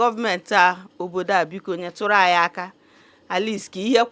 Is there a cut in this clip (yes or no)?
no